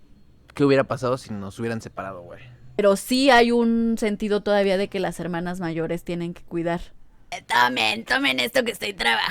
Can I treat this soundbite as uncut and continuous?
no; 2 cuts; at 2.8 s, 7.4 s

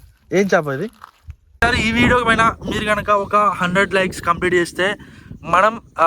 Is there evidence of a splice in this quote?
yes; 1 cut; at 1.6 s

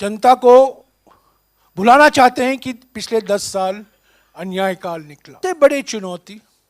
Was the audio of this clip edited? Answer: yes; 1 cut; at 5.3 s

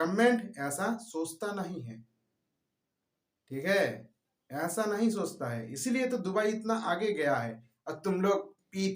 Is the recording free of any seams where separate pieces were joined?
yes; 0 cuts

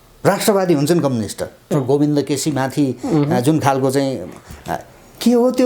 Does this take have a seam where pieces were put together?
yes; 1 cut; at 1.7 s

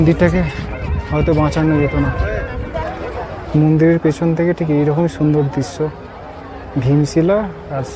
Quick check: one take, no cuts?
no; 1 cut; at 2.8 s

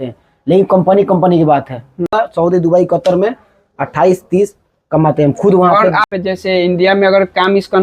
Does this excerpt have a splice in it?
yes; 2 cuts; at 2.1 s, 6.0 s

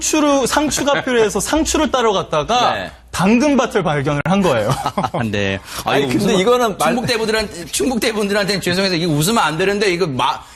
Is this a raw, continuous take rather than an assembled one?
yes; 0 cuts

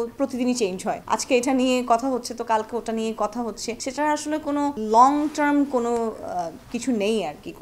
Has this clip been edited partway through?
no; 0 cuts

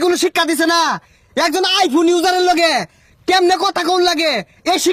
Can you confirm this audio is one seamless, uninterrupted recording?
yes; 0 cuts

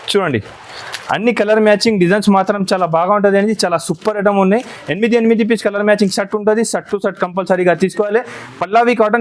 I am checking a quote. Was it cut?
no; 0 cuts

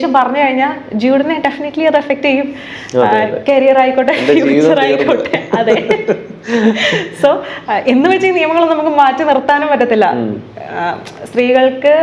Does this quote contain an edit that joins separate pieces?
no; 0 cuts

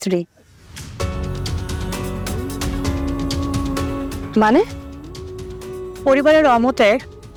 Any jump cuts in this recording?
no; 0 cuts

